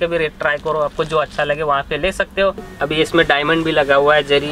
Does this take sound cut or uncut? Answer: cut